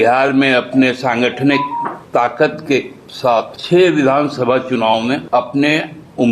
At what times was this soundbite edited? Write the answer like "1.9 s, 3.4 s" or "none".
2.0 s, 3.6 s, 5.2 s

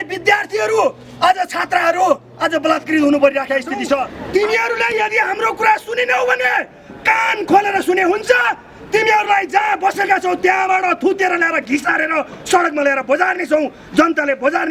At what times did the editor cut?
4.1 s

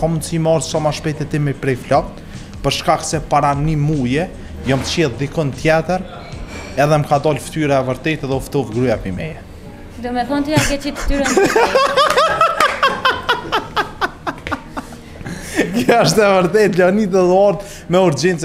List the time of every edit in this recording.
none

